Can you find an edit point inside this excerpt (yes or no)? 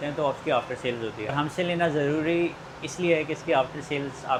no